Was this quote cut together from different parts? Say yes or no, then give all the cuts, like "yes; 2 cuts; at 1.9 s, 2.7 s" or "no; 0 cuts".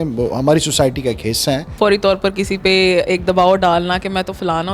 yes; 1 cut; at 1.7 s